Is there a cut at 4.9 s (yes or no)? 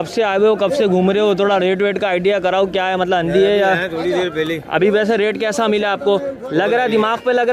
no